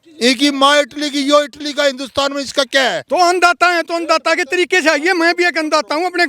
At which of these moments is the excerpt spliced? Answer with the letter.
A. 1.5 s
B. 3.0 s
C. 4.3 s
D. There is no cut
B